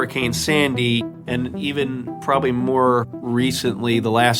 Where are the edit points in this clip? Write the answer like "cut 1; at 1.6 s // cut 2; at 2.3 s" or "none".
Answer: cut 1; at 1.2 s